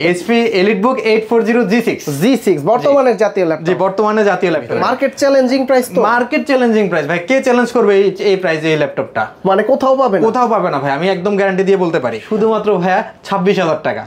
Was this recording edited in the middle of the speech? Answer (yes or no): yes